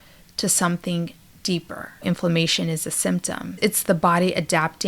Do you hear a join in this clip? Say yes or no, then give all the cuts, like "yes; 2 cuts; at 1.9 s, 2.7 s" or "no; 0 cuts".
yes; 2 cuts; at 2.0 s, 3.6 s